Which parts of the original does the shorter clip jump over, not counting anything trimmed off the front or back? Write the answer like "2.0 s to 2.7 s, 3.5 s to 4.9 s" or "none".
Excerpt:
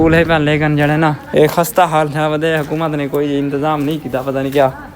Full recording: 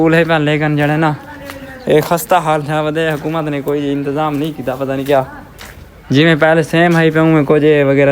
1.2 s to 1.8 s